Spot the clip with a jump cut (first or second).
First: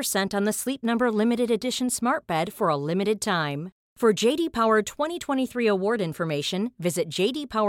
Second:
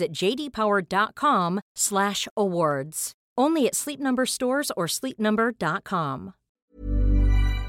second